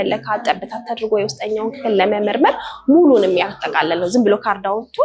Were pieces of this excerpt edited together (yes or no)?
no